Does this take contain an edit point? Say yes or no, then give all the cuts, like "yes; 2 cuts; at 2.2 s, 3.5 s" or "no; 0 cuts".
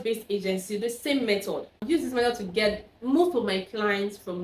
yes; 1 cut; at 1.8 s